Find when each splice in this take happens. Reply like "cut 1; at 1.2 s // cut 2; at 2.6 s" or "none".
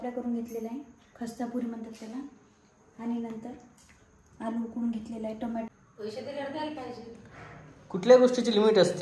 cut 1; at 5.7 s